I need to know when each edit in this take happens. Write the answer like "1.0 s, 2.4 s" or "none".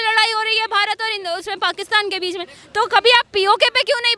none